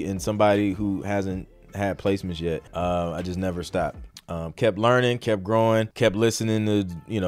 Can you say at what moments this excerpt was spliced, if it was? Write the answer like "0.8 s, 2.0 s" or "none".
2.7 s, 4.1 s, 5.9 s